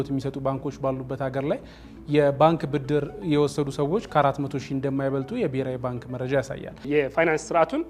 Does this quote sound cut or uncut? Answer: cut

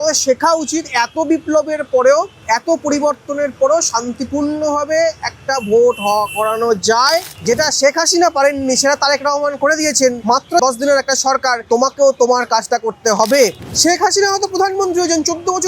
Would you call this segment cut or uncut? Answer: cut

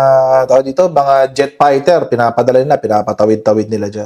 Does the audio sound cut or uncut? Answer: uncut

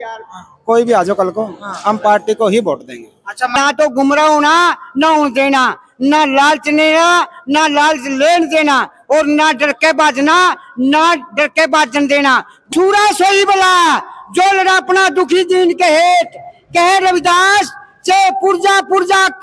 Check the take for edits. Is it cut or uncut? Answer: cut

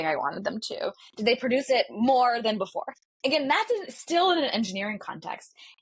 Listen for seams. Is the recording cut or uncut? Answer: uncut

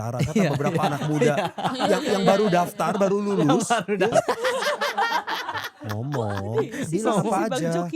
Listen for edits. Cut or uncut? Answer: cut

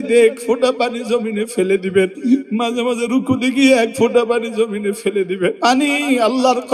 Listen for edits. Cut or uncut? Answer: cut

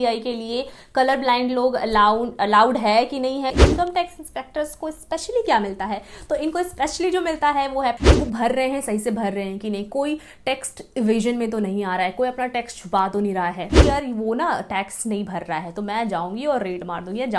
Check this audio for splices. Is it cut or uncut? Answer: cut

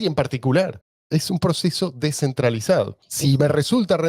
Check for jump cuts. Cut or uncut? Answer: cut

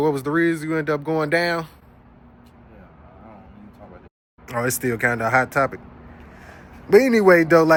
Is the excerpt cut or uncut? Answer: uncut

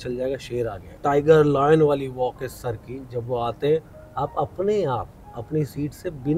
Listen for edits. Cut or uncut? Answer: cut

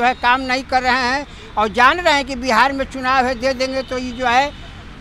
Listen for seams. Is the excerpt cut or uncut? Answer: uncut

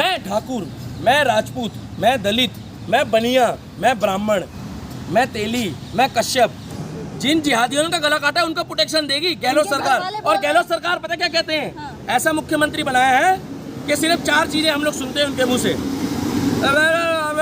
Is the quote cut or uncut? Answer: cut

